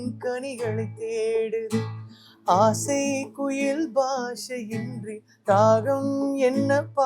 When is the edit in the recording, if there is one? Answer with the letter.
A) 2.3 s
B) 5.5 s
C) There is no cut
C